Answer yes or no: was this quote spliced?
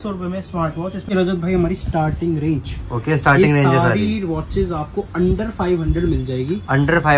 yes